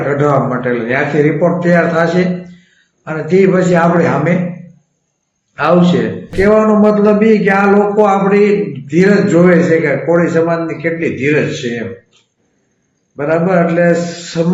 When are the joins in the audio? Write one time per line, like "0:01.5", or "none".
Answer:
0:06.3